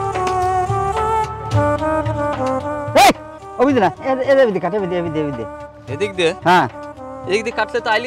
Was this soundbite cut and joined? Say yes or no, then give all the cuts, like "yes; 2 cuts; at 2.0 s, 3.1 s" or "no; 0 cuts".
no; 0 cuts